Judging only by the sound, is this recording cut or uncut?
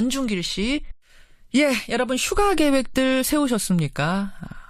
uncut